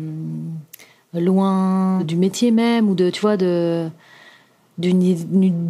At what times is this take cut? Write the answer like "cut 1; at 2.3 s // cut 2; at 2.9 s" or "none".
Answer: cut 1; at 2.0 s